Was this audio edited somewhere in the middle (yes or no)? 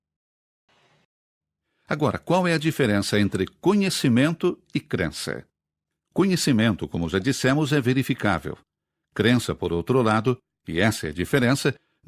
no